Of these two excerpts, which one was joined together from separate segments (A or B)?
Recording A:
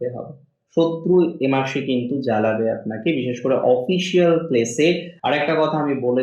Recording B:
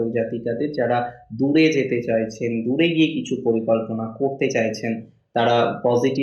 A